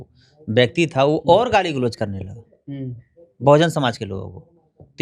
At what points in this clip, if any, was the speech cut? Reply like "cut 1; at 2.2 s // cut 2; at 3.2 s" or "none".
none